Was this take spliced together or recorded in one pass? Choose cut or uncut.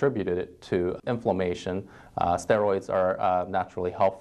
cut